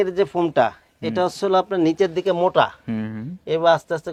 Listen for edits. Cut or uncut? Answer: uncut